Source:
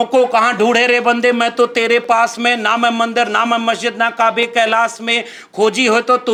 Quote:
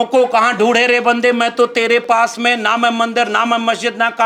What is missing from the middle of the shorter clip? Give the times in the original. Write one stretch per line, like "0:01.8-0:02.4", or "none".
none